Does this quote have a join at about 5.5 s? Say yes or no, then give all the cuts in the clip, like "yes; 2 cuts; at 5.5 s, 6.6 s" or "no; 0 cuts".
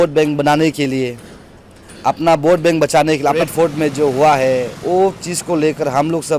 no; 1 cut; at 3.4 s